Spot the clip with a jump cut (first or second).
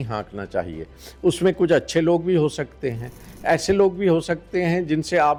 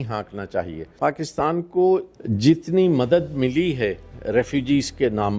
second